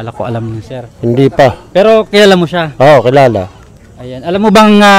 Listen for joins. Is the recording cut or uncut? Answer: uncut